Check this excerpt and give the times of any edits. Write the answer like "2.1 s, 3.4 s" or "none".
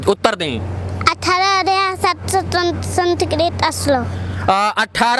none